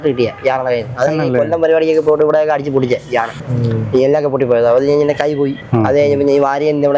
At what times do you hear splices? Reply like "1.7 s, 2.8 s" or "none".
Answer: none

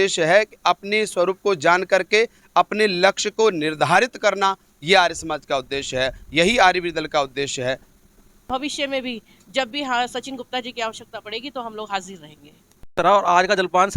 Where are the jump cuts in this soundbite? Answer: 8.4 s, 12.9 s

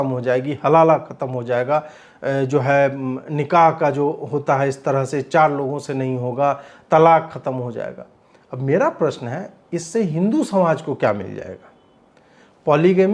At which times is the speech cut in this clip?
none

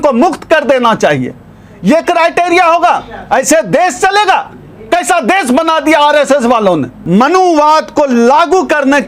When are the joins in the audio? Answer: 6.9 s

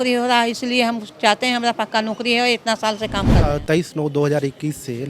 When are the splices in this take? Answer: 3.5 s

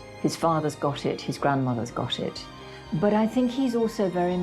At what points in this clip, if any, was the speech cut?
2.5 s

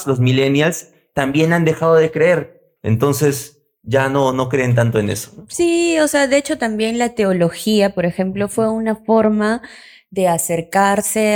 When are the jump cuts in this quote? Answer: none

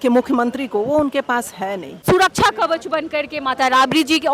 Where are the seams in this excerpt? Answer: 2.0 s

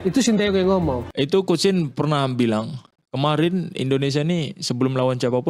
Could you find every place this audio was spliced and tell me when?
1.1 s

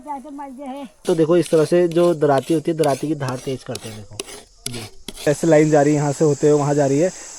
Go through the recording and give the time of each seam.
1.0 s, 5.3 s

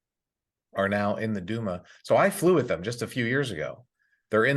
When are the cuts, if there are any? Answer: none

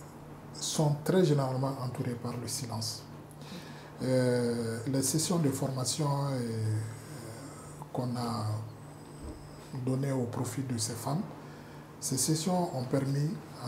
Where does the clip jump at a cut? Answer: none

